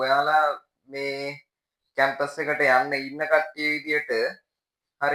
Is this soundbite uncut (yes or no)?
yes